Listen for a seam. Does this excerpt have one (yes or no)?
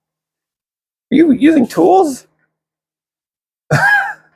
no